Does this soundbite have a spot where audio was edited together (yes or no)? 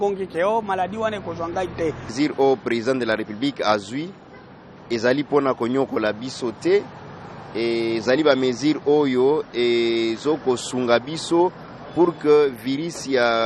yes